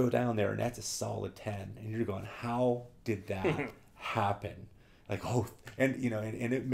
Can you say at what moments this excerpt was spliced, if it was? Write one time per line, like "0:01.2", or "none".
none